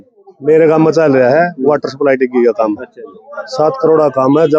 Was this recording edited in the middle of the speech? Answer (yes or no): no